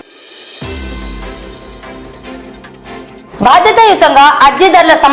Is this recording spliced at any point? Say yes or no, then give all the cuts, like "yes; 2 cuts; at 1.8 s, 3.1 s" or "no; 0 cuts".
no; 0 cuts